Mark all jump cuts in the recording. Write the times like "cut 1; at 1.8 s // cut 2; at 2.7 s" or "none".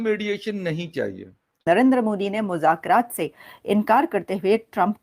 cut 1; at 1.6 s